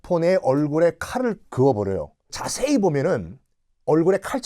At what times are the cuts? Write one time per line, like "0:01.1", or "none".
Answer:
0:02.4